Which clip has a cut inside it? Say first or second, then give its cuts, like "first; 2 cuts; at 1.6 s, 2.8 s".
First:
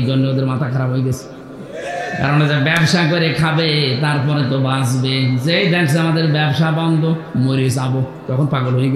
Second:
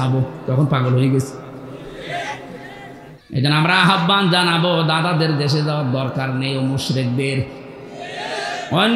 second; 1 cut; at 3.1 s